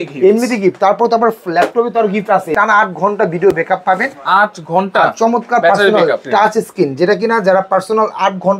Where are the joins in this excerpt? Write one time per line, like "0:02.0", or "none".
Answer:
0:02.5
0:06.2